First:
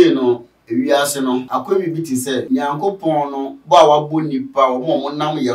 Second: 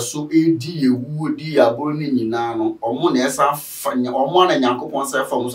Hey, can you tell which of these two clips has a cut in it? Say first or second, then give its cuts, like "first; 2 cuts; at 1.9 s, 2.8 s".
first; 2 cuts; at 1.5 s, 2.5 s